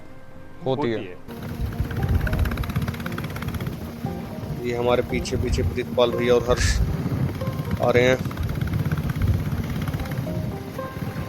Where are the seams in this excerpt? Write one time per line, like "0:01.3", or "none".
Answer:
0:01.3